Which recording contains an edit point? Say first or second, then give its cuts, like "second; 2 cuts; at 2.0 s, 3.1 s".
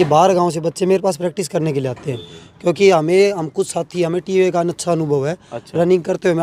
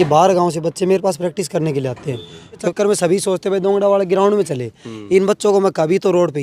second; 1 cut; at 2.7 s